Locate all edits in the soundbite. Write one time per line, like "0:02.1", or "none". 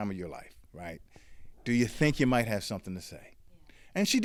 none